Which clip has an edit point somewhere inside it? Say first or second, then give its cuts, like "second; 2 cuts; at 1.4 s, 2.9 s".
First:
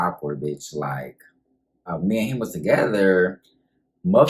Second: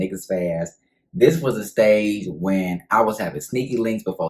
first; 1 cut; at 1.8 s